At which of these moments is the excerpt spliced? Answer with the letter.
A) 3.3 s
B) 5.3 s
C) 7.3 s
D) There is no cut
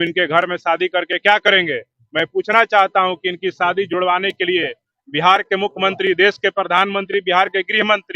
D